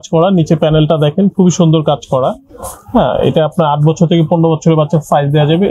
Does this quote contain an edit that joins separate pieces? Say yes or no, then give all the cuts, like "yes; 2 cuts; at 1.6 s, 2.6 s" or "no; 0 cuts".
no; 0 cuts